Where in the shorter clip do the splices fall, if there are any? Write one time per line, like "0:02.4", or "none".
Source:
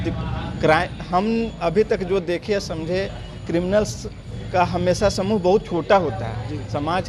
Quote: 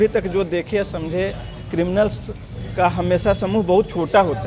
none